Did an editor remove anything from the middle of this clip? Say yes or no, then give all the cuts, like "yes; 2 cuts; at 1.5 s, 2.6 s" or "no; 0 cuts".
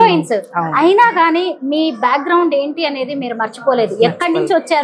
no; 0 cuts